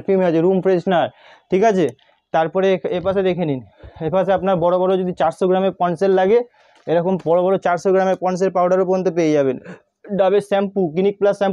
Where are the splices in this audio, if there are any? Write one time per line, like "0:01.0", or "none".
none